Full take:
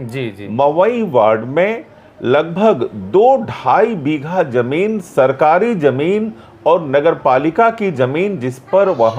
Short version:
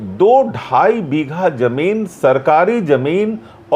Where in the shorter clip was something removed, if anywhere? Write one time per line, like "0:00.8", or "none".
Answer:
none

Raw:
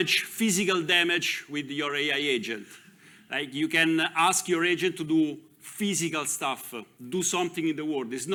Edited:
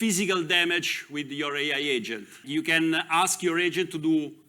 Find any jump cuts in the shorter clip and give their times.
0:02.4

